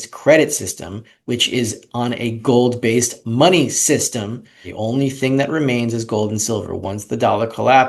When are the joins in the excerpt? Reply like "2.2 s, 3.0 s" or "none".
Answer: 4.7 s

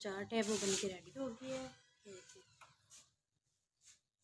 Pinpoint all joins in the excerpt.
none

